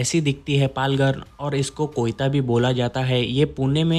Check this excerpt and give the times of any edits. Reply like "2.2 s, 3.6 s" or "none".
none